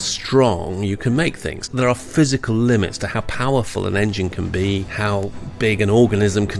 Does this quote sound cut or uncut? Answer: cut